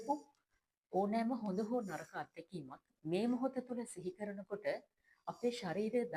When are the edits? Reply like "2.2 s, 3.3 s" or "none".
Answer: 2.9 s